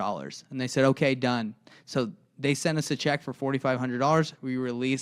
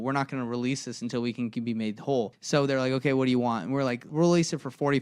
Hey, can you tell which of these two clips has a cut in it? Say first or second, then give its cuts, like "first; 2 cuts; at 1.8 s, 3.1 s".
second; 2 cuts; at 2.4 s, 4.1 s